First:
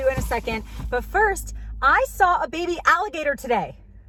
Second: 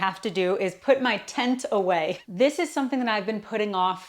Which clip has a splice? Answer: second; 1 cut; at 2.2 s

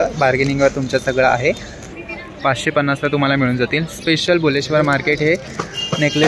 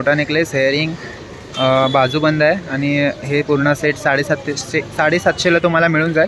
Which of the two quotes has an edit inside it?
first; 1 cut; at 2.1 s

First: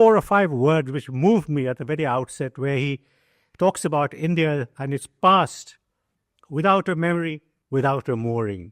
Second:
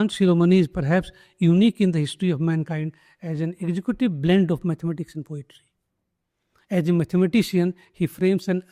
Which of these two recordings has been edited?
first; 1 cut; at 7.5 s

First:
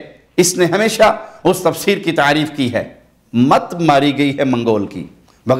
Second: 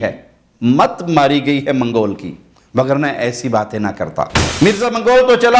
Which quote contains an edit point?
second; 1 cut; at 4.5 s

